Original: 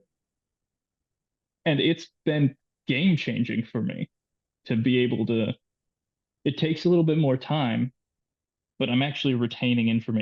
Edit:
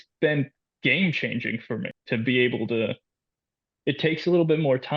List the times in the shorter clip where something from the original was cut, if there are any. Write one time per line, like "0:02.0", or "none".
0:01.9